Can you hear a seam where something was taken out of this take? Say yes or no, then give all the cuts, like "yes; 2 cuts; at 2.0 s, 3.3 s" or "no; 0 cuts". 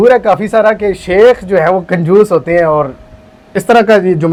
no; 0 cuts